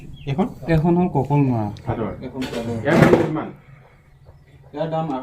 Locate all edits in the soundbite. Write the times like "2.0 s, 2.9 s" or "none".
1.8 s